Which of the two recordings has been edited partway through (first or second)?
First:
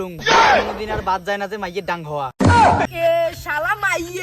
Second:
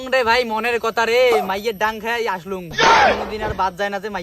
first